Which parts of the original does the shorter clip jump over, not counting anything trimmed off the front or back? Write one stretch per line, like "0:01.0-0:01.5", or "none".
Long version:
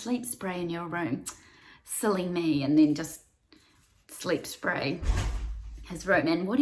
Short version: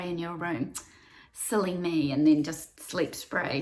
0:03.2-0:04.0